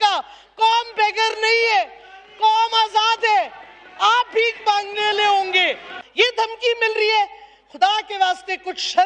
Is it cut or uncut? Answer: cut